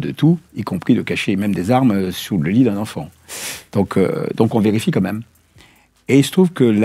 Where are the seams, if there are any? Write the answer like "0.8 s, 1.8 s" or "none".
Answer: none